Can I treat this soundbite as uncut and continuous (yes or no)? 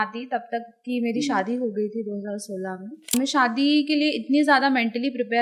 no